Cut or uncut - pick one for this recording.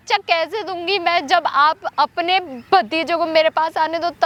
uncut